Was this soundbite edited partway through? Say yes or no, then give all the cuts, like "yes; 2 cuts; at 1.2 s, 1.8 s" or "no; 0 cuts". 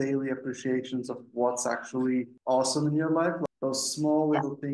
yes; 2 cuts; at 2.3 s, 3.4 s